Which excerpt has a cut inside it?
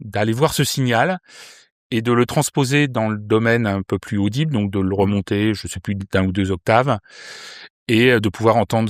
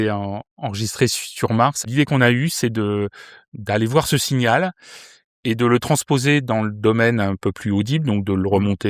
second; 1 cut; at 1.8 s

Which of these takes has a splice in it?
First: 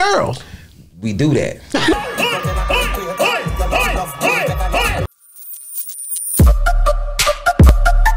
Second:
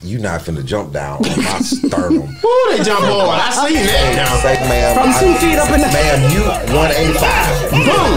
first; 1 cut; at 5.0 s

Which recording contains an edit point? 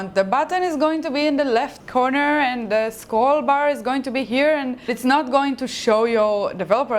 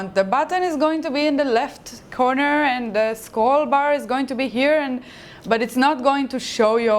first; 2 cuts; at 1.8 s, 4.9 s

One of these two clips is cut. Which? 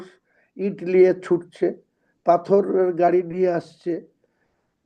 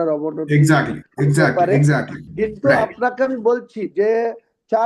second; 1 cut; at 2.2 s

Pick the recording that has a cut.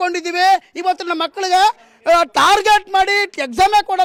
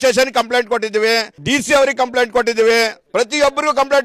second; 2 cuts; at 1.3 s, 3.0 s

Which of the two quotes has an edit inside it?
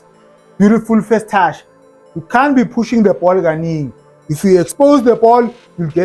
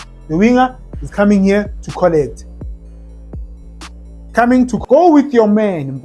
second; 1 cut; at 4.8 s

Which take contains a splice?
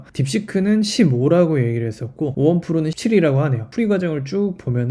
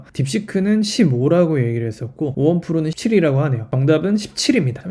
second; 1 cut; at 3.7 s

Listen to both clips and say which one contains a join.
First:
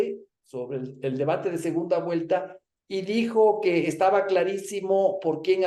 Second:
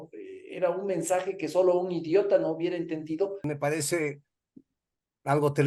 second; 1 cut; at 3.4 s

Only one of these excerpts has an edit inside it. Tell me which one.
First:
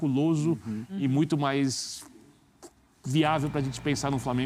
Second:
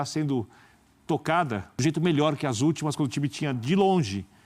second; 1 cut; at 1.7 s

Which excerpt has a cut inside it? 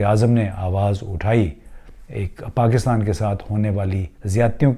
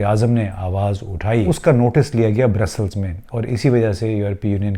second; 1 cut; at 1.4 s

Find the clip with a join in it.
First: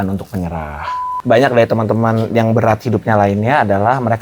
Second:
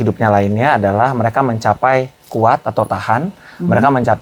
first; 1 cut; at 1.1 s

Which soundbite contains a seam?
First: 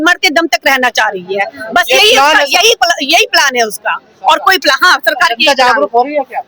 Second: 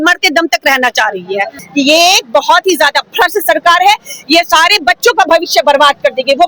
second; 1 cut; at 1.6 s

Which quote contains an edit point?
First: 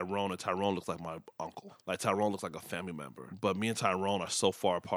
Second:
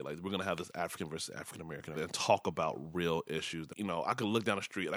second; 2 cuts; at 1.9 s, 3.6 s

